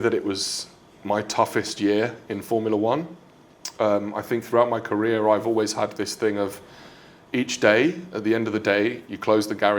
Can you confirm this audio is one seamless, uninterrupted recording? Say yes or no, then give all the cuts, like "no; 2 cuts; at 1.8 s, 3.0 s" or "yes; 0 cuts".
yes; 0 cuts